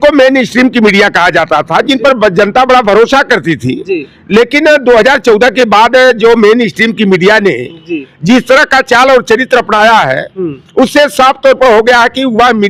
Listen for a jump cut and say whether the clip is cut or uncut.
uncut